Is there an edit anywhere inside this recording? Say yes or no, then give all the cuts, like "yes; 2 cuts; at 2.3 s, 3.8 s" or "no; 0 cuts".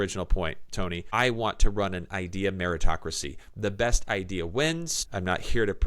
yes; 2 cuts; at 1.1 s, 5.0 s